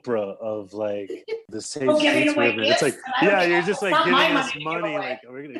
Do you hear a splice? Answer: yes; 1 cut; at 1.4 s

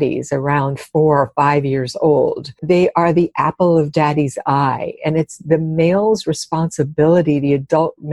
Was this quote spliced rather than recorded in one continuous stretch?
yes; 1 cut; at 2.6 s

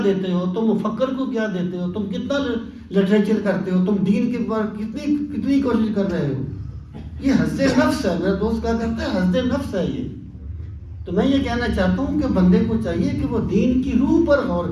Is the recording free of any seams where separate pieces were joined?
yes; 0 cuts

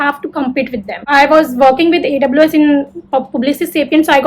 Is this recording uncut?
no; 1 cut; at 1.0 s

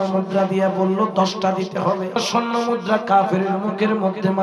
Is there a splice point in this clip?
yes; 1 cut; at 2.2 s

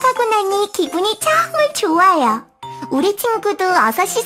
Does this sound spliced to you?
no; 0 cuts

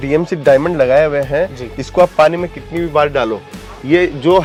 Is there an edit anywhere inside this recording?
no; 0 cuts

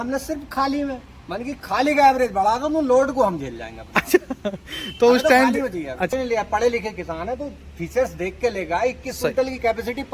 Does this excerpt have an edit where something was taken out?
yes; 1 cut; at 6.1 s

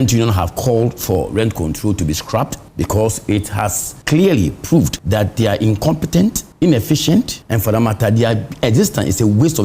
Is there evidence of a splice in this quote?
yes; 5 cuts; at 2.6 s, 3.9 s, 5.0 s, 6.5 s, 7.4 s

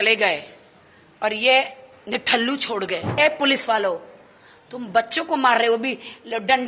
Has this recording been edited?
yes; 1 cut; at 3.2 s

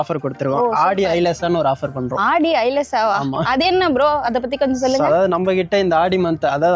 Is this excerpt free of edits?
yes; 0 cuts

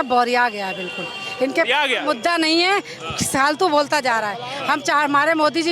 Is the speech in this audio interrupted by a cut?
no; 0 cuts

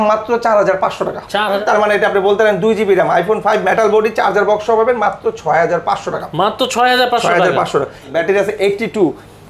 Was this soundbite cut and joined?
yes; 2 cuts; at 1.6 s, 8.1 s

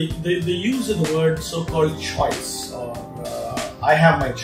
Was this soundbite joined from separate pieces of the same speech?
no; 0 cuts

